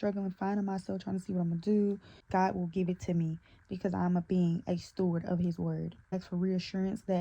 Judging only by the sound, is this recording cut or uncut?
cut